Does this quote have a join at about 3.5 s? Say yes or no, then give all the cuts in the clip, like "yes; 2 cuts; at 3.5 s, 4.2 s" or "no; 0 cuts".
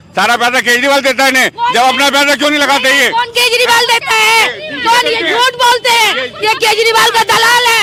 no; 0 cuts